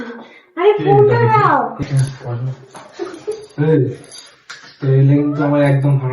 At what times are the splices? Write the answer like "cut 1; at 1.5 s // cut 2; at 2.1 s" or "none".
cut 1; at 1.8 s